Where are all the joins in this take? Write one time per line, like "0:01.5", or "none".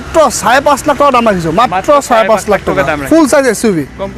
none